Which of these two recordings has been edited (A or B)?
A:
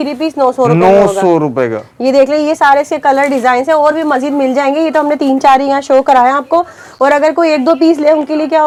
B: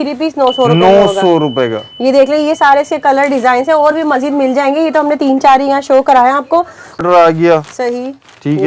B